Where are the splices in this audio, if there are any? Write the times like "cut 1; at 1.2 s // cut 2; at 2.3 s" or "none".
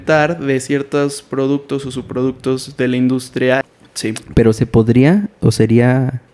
cut 1; at 3.7 s